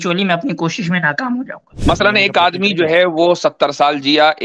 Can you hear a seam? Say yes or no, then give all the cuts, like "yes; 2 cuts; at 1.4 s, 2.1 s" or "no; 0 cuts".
yes; 1 cut; at 1.7 s